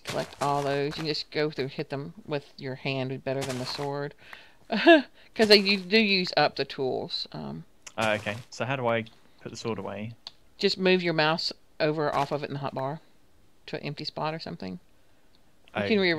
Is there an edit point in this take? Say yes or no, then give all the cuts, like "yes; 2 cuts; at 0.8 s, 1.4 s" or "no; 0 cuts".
yes; 1 cut; at 8.8 s